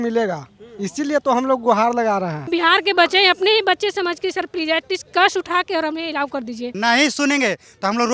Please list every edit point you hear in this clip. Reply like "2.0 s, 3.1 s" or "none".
2.4 s, 6.7 s